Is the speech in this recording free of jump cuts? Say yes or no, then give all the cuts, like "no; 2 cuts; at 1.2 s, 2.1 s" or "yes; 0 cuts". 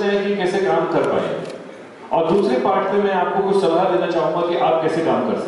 yes; 0 cuts